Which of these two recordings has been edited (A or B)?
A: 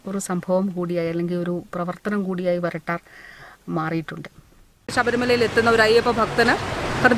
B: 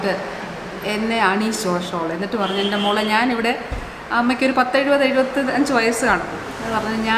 A